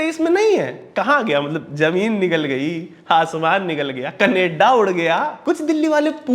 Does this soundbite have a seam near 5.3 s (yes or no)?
yes